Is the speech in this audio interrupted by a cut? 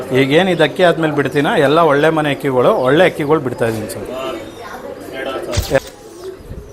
yes; 1 cut; at 5.8 s

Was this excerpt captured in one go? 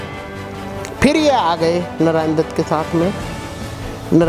yes; 0 cuts

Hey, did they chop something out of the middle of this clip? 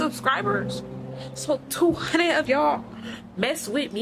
no; 0 cuts

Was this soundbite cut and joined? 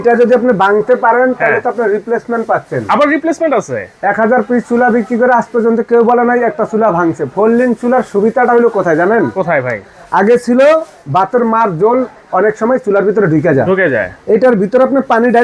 no; 0 cuts

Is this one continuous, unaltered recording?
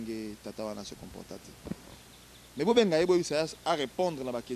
no; 1 cut; at 1.9 s

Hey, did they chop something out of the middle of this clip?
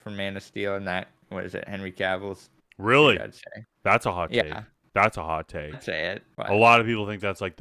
yes; 1 cut; at 6.3 s

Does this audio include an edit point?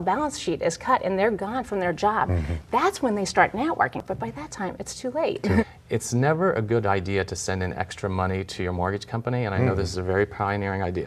yes; 2 cuts; at 4.0 s, 5.6 s

